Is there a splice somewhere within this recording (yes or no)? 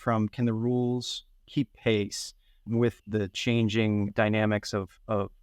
yes